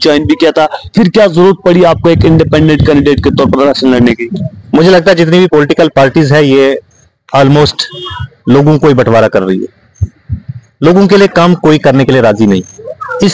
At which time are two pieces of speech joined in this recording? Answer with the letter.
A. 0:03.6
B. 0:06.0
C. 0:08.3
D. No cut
D